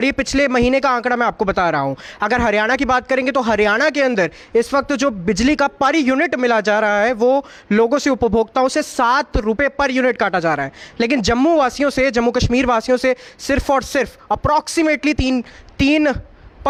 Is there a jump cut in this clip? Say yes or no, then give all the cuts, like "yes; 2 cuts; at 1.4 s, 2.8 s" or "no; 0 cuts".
no; 0 cuts